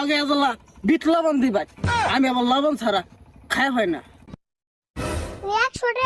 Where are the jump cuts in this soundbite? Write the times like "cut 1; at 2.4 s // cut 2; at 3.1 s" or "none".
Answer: cut 1; at 4.4 s